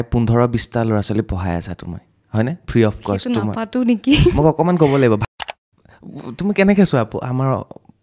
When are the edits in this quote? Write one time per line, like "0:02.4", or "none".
0:05.2